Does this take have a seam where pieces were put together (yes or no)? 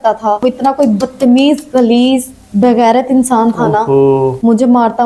no